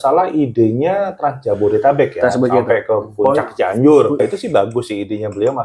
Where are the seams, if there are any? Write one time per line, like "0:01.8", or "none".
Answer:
0:04.2